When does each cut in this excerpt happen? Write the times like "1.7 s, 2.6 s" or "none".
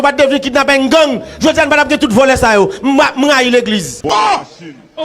3.9 s